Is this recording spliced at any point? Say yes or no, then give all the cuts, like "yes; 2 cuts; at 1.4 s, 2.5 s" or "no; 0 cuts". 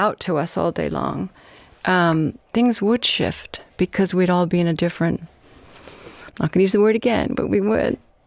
no; 0 cuts